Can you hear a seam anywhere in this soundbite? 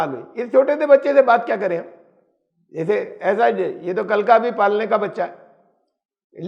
no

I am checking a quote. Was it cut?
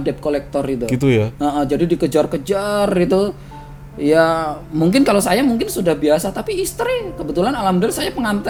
no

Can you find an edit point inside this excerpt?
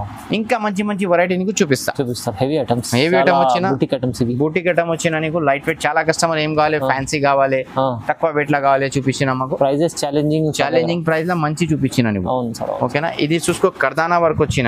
no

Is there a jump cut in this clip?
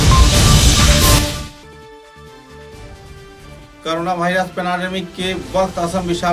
yes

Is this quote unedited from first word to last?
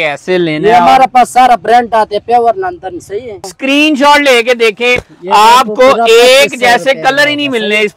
no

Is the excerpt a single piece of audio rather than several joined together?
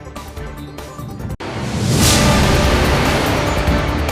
no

